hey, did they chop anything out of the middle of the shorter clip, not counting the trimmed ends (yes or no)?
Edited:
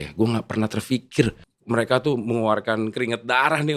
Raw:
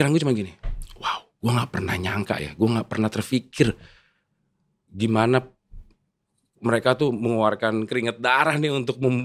yes